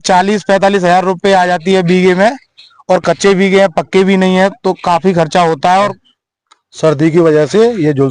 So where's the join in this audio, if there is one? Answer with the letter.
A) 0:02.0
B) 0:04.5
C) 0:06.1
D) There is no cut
C